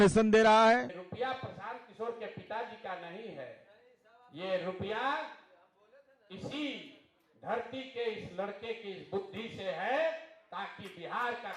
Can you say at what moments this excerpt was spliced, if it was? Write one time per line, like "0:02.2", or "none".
0:00.9